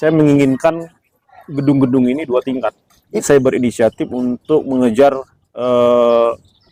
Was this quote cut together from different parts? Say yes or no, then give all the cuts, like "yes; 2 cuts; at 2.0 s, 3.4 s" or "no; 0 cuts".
no; 0 cuts